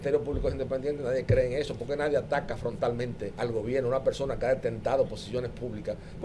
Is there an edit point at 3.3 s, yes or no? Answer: yes